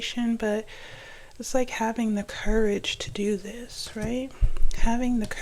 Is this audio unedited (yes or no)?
yes